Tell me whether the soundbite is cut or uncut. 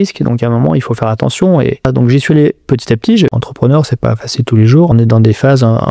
cut